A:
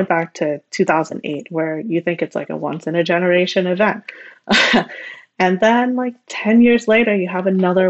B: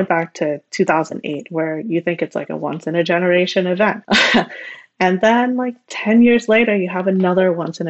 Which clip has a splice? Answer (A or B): B